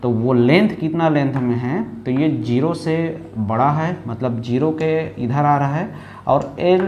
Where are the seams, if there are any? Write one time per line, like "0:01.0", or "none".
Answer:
none